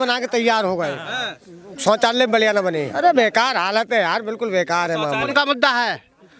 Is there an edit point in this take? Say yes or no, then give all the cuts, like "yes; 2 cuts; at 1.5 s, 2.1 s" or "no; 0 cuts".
yes; 2 cuts; at 2.9 s, 5.3 s